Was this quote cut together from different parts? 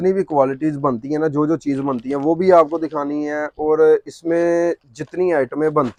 no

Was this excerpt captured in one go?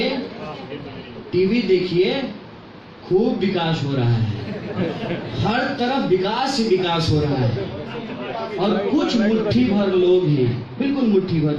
yes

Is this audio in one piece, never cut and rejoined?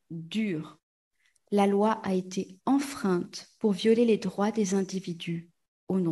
no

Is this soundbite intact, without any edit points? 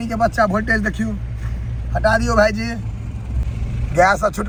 yes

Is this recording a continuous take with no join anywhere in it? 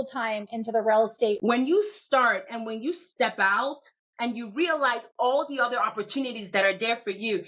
no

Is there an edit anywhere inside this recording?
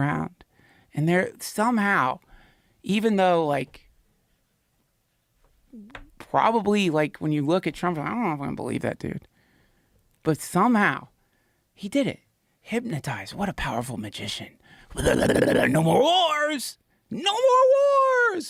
no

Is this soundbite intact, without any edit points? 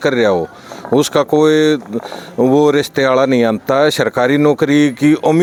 yes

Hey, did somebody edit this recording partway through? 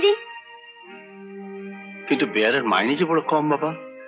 no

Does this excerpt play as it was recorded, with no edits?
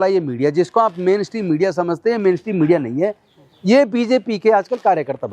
yes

